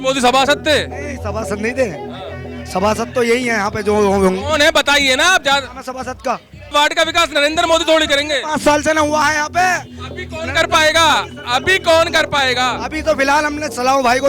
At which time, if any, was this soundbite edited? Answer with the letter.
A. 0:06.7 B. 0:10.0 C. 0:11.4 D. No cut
A